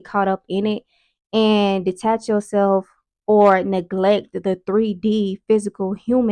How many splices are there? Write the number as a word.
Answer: zero